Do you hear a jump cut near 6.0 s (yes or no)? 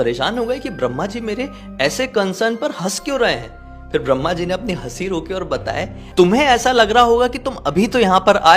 yes